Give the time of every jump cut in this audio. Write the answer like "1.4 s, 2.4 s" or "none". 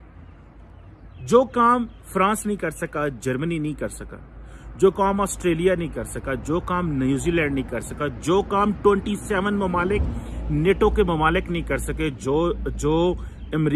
none